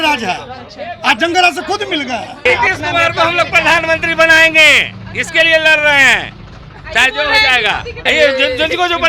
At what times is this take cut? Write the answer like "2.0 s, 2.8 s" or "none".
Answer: 2.5 s, 8.0 s